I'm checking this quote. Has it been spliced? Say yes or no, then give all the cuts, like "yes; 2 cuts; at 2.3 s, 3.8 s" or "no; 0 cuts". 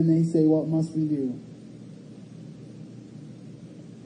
no; 0 cuts